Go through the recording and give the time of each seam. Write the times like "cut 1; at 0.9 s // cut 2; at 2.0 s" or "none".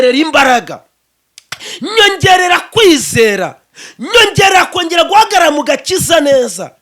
none